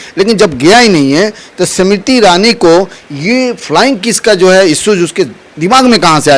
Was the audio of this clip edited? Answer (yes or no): no